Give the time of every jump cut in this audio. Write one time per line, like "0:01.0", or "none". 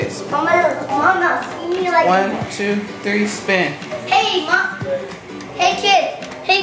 none